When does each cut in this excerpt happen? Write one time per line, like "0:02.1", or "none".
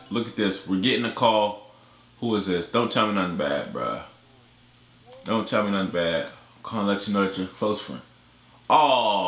none